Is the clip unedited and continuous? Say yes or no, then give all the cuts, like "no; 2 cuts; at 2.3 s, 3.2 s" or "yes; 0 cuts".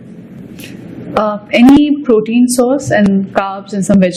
yes; 0 cuts